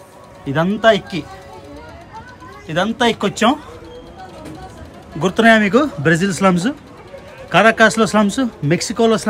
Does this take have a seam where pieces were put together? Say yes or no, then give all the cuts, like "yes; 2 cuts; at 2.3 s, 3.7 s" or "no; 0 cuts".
no; 0 cuts